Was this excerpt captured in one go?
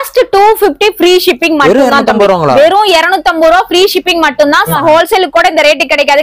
no; 1 cut; at 4.6 s

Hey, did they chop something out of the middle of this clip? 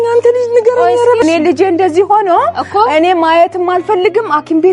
yes; 1 cut; at 1.2 s

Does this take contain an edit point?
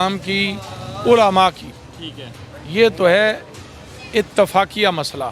no; 0 cuts

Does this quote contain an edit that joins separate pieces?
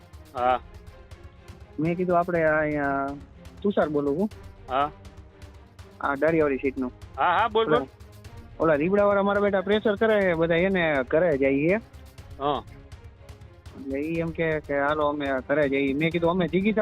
no; 0 cuts

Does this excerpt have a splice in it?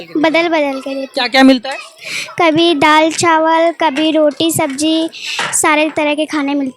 no; 0 cuts

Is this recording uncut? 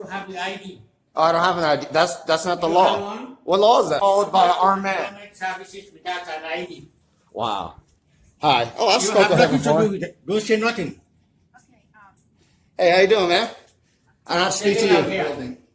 no; 1 cut; at 4.0 s

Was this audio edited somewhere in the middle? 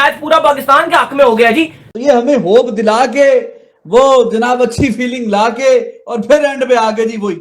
yes; 1 cut; at 1.8 s

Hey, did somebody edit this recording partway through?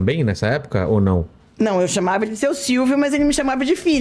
no; 0 cuts

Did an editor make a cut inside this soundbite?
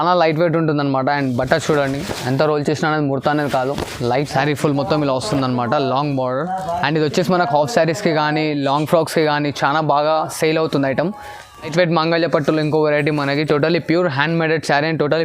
yes; 2 cuts; at 4.2 s, 11.7 s

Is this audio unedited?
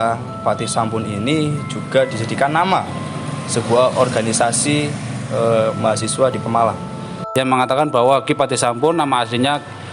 no; 1 cut; at 7.2 s

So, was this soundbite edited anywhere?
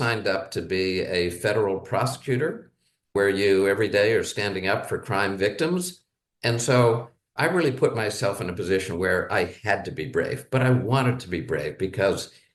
no; 0 cuts

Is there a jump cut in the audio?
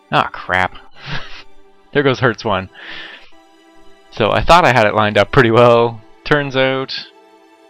yes; 1 cut; at 2.5 s

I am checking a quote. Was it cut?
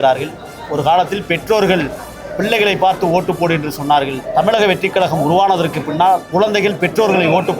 yes; 2 cuts; at 4.2 s, 6.3 s

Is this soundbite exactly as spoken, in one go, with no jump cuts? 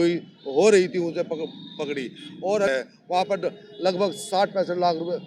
yes; 0 cuts

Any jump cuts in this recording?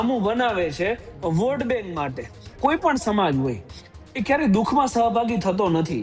yes; 1 cut; at 2.5 s

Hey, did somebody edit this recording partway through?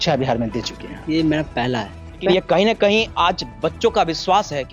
yes; 1 cut; at 2.3 s

